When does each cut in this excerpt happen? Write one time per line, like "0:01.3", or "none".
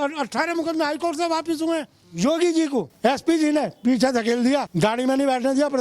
0:02.0
0:02.9
0:04.7